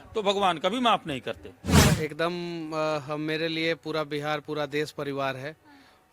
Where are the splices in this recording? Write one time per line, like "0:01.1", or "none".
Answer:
0:01.9